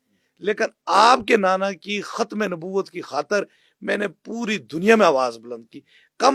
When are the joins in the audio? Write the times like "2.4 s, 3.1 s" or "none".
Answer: none